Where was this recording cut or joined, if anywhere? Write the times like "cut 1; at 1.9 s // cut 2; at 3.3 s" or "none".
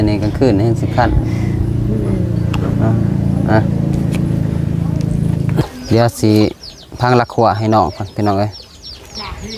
cut 1; at 5.6 s

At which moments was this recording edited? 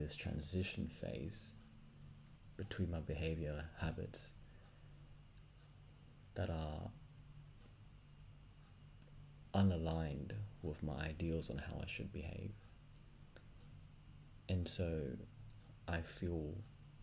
none

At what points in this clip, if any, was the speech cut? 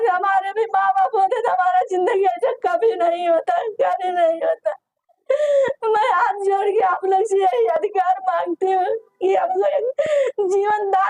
none

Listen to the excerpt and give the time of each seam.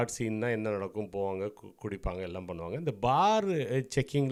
none

